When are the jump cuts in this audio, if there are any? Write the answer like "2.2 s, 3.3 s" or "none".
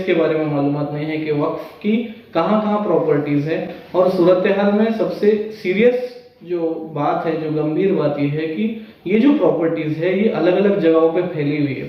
none